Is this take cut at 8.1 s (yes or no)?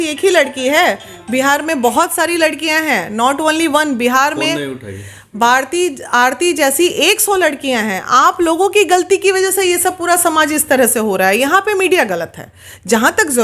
no